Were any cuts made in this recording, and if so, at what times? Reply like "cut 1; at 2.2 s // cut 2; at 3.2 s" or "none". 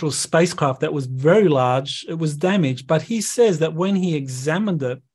none